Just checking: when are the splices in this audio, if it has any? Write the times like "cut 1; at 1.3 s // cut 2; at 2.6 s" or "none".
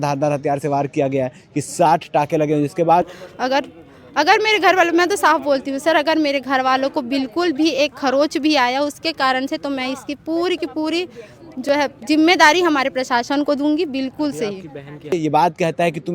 cut 1; at 3.1 s // cut 2; at 15.1 s